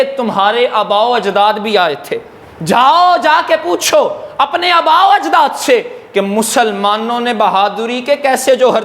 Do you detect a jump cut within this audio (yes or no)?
no